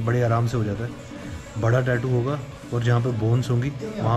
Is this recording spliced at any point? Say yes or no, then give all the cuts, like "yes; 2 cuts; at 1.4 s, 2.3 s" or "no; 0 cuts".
no; 0 cuts